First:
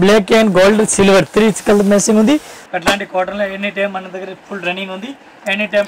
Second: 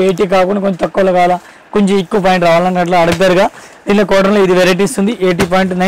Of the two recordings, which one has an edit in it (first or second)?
first